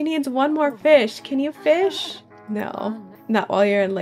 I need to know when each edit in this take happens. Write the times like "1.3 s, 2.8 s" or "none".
3.1 s